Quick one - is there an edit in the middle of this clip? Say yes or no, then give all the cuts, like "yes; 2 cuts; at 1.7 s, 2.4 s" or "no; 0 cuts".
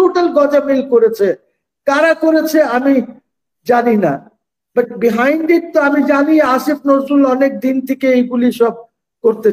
no; 0 cuts